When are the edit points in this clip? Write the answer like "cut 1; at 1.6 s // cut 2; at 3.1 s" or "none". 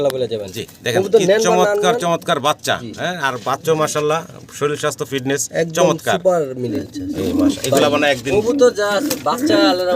cut 1; at 6.8 s